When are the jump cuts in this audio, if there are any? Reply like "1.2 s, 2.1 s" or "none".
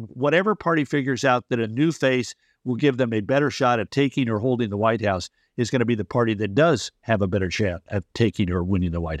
3.9 s